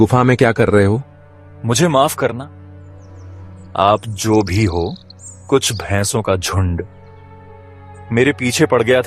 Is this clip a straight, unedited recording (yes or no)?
yes